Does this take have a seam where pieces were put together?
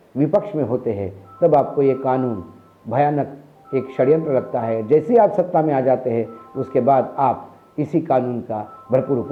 no; 0 cuts

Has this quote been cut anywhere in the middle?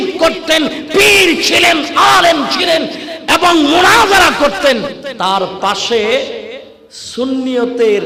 no; 0 cuts

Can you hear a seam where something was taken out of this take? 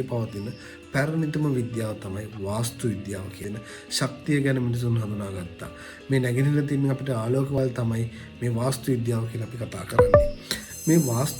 yes; 2 cuts; at 3.4 s, 7.6 s

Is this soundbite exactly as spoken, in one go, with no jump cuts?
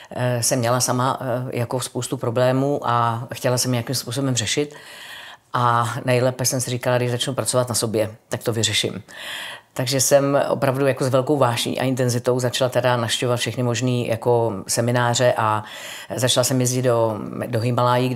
yes; 0 cuts

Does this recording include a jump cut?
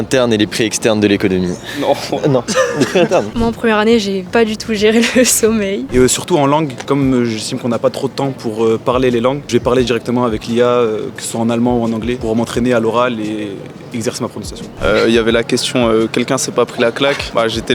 yes; 3 cuts; at 3.3 s, 5.9 s, 14.8 s

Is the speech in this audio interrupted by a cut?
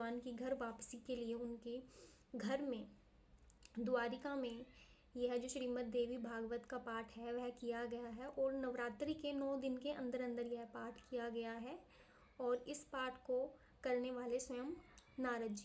no; 0 cuts

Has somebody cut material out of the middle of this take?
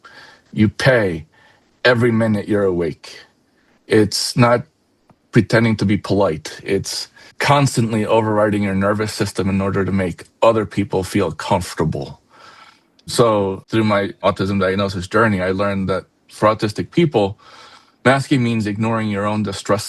no; 0 cuts

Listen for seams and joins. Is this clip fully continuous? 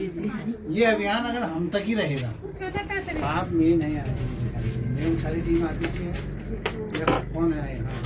yes; 0 cuts

